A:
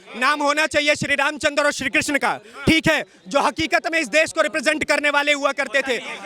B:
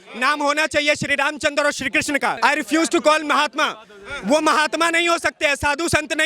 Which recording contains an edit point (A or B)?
B